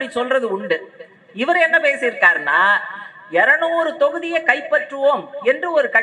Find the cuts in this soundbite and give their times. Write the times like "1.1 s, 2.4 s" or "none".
none